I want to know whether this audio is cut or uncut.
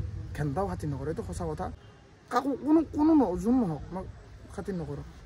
cut